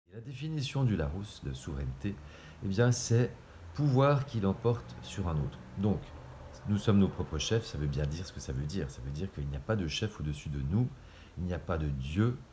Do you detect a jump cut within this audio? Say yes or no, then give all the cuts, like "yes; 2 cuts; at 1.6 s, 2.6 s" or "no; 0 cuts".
no; 0 cuts